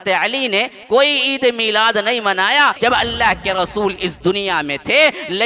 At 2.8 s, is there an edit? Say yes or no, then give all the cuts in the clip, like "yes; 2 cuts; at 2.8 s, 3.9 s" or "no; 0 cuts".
yes; 1 cut; at 2.8 s